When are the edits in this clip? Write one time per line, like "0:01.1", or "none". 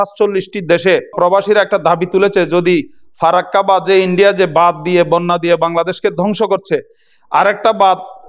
0:01.1